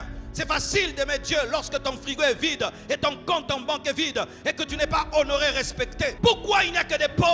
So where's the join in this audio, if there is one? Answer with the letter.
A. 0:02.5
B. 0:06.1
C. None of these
B